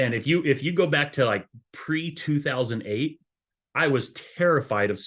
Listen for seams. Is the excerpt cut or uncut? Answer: uncut